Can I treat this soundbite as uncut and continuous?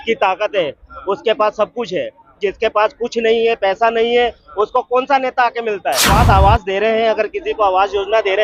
no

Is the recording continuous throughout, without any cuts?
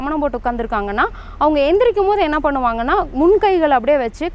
yes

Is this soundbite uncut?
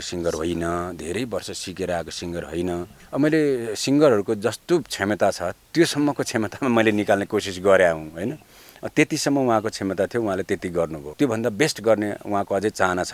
no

